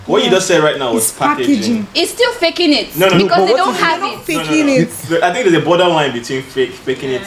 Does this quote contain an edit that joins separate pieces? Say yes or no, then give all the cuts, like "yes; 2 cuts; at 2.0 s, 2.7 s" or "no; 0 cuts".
no; 0 cuts